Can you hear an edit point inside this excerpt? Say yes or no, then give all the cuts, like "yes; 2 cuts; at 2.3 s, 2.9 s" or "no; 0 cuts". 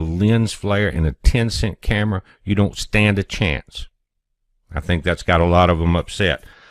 yes; 1 cut; at 3.0 s